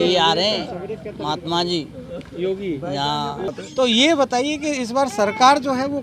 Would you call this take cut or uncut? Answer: cut